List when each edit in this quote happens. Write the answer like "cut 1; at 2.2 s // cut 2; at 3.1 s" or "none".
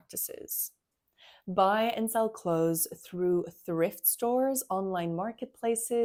none